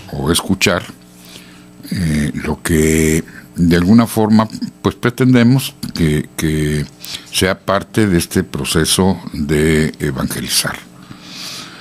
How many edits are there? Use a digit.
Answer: 1